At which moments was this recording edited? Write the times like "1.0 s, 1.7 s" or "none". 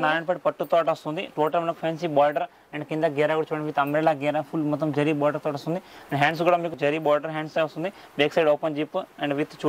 none